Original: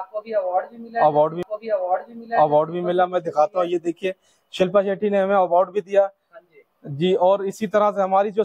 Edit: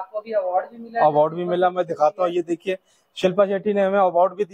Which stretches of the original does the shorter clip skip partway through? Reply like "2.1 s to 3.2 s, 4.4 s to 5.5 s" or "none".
1.3 s to 2.7 s